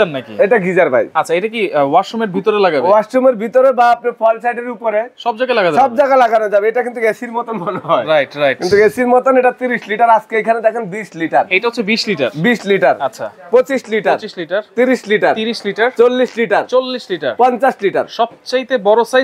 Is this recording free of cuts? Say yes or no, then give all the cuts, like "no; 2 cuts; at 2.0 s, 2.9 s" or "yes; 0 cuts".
yes; 0 cuts